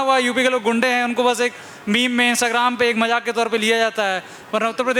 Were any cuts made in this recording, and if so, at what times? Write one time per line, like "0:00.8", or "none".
none

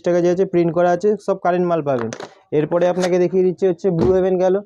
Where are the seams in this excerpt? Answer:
none

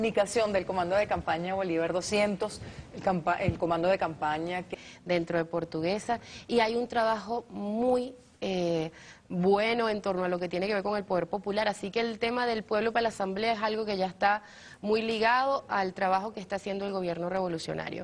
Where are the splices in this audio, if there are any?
none

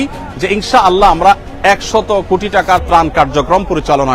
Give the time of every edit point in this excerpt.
none

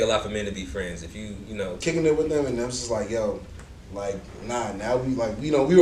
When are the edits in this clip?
0:01.8

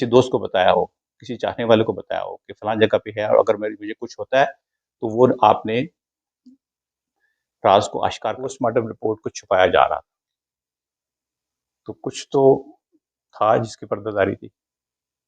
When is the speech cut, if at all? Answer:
0:08.5

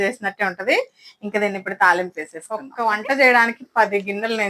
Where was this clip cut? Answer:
0:02.6

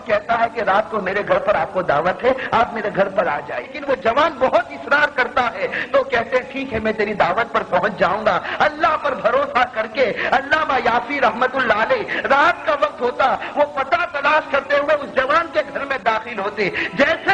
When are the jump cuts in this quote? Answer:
0:03.8

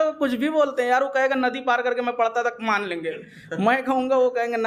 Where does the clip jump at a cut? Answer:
none

